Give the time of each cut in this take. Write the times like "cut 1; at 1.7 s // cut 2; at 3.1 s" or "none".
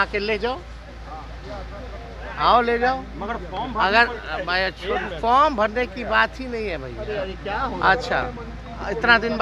none